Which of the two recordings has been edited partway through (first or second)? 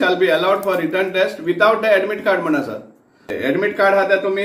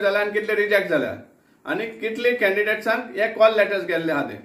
first